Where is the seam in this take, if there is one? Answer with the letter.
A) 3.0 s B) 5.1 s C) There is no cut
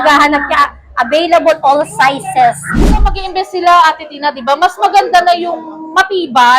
A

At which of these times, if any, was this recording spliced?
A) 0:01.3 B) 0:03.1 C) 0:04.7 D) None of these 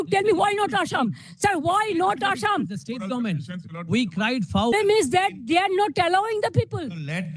C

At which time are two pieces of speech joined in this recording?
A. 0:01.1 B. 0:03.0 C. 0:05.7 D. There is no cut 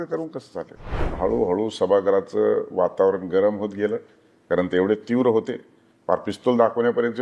A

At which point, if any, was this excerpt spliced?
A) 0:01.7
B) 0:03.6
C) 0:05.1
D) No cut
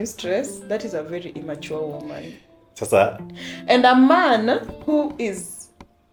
D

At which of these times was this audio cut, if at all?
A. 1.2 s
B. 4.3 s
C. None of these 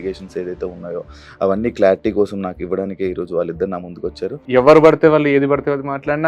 B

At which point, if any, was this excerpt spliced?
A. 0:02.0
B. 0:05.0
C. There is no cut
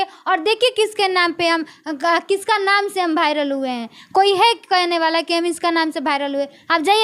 C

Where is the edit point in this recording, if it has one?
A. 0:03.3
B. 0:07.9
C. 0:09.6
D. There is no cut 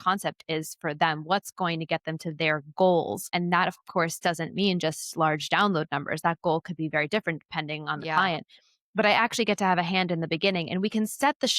A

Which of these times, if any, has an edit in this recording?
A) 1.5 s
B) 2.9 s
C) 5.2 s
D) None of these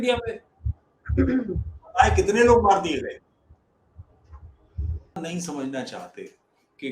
C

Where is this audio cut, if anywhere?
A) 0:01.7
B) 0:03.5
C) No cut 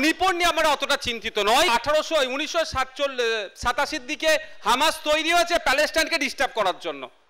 A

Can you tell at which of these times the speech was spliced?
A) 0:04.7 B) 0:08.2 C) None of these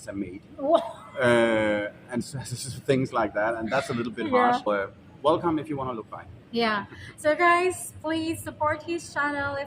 A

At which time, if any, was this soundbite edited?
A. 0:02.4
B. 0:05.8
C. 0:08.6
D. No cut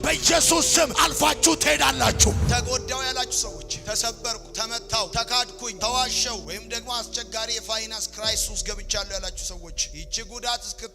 A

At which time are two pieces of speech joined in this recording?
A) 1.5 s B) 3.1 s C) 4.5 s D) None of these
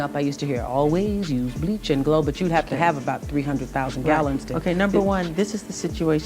D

